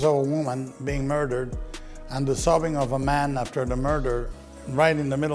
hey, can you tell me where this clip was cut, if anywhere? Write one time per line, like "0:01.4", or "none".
none

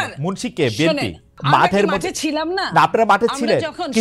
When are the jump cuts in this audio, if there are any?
0:01.3

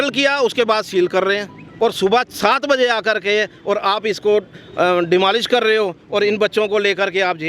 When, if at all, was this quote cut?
0:01.6

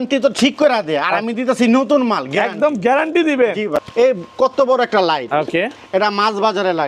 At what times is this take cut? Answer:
0:03.8

